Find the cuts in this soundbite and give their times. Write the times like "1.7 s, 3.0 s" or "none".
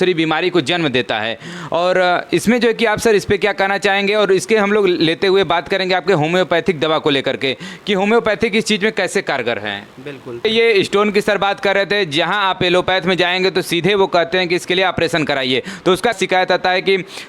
10.4 s, 16.2 s